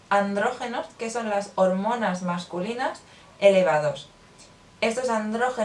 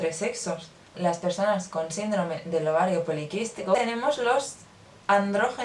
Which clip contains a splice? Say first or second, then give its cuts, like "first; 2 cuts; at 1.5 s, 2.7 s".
second; 2 cuts; at 0.9 s, 3.8 s